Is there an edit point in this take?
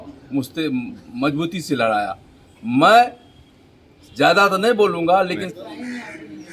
yes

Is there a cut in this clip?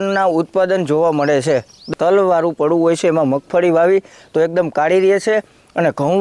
yes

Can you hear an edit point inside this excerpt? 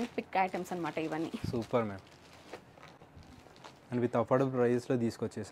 no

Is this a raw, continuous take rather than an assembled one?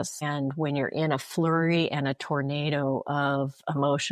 yes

